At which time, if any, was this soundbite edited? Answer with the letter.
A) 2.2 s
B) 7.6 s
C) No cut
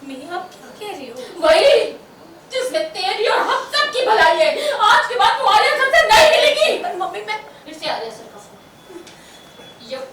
B